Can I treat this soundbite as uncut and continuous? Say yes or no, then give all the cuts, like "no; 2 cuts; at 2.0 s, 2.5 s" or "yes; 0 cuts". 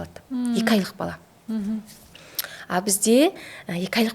yes; 0 cuts